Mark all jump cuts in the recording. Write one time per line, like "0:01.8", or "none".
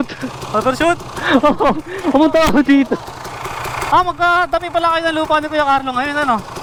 none